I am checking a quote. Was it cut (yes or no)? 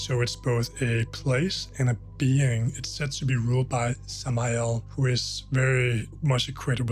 yes